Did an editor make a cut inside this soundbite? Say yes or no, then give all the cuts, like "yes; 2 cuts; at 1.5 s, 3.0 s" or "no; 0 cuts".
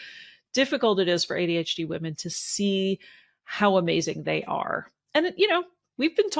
no; 0 cuts